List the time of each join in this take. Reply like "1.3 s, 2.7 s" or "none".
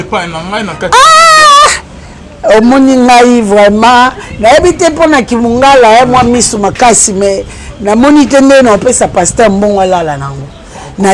none